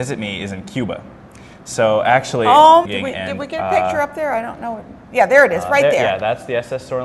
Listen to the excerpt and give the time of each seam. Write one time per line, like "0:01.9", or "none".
none